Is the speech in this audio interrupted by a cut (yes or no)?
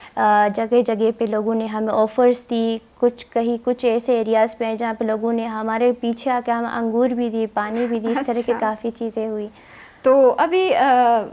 no